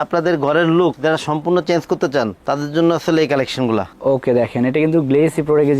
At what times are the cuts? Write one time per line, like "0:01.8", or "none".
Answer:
none